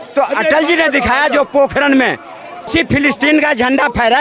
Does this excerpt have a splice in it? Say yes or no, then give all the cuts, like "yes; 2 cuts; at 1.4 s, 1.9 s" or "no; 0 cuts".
yes; 1 cut; at 2.7 s